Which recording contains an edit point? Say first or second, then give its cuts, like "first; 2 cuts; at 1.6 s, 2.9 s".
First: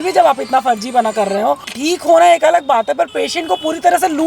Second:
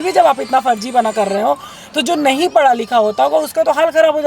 first; 1 cut; at 1.7 s